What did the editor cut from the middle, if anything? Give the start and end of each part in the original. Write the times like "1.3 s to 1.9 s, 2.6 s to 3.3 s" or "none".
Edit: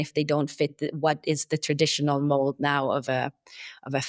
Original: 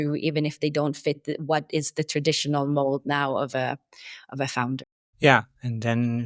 none